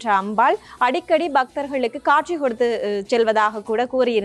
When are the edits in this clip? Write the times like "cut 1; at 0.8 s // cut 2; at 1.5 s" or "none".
none